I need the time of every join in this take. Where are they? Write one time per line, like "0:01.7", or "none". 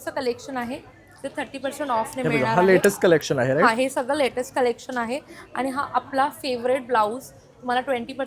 none